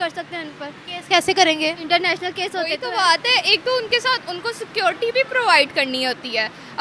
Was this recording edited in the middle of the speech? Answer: yes; 1 cut; at 2.8 s

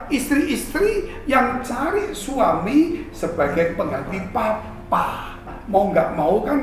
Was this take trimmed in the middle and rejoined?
yes; 1 cut; at 5.5 s

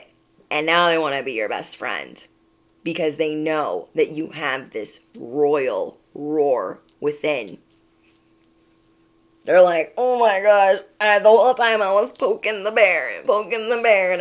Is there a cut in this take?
no; 0 cuts

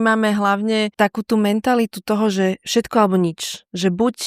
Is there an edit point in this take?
yes; 1 cut; at 0.9 s

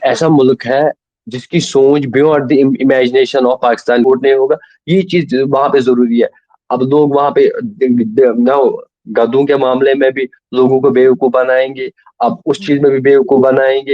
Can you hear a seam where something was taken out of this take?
yes; 1 cut; at 4.0 s

